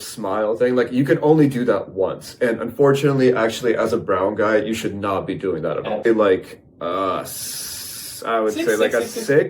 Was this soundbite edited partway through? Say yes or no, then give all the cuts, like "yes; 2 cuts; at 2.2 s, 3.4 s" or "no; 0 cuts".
yes; 1 cut; at 6.0 s